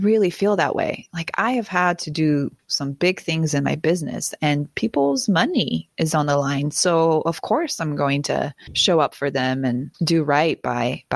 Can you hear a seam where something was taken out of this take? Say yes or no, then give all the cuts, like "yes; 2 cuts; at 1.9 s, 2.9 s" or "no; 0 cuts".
yes; 1 cut; at 8.7 s